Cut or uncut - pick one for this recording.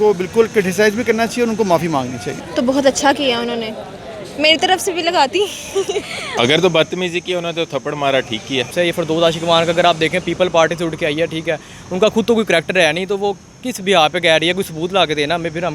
cut